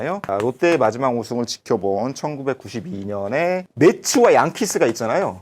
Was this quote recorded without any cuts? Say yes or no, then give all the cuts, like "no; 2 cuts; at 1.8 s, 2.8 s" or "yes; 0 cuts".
no; 1 cut; at 3.7 s